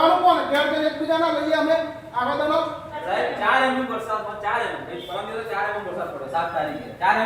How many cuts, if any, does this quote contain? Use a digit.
1